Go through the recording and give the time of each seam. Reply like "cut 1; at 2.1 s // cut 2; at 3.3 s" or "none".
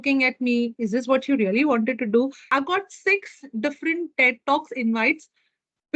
cut 1; at 2.4 s